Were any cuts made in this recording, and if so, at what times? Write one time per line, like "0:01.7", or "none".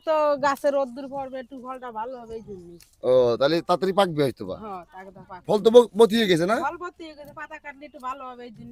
none